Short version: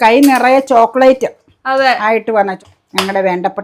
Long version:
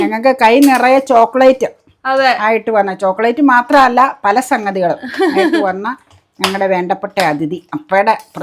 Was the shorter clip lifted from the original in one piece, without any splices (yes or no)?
no